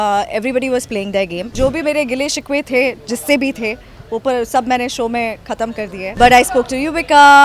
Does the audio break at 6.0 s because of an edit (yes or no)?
yes